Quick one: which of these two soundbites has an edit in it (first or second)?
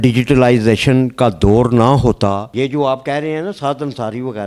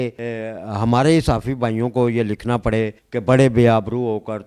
first